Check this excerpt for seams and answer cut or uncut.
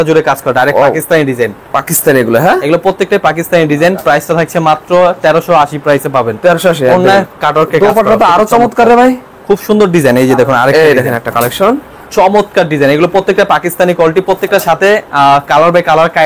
uncut